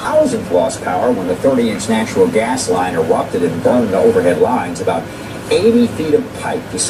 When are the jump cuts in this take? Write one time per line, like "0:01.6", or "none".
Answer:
0:03.4